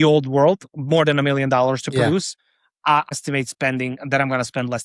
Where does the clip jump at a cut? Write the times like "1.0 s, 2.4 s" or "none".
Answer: 3.1 s

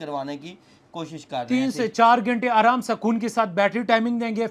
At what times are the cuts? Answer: none

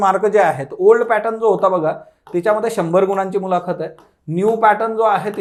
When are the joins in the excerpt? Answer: none

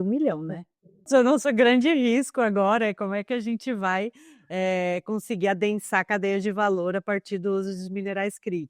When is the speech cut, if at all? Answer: 1.1 s

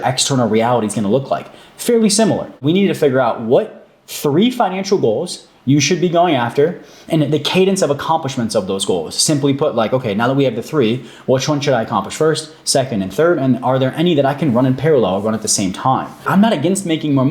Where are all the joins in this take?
2.6 s, 16.3 s

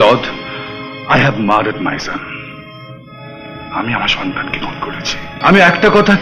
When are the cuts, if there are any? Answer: 5.2 s

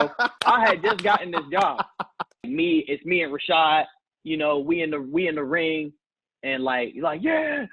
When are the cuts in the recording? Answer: 2.5 s

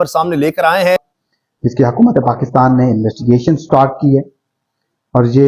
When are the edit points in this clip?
1.0 s

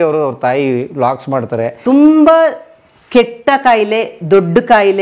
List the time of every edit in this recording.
1.7 s

